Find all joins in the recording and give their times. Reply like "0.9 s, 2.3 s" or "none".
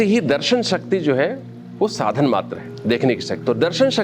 3.0 s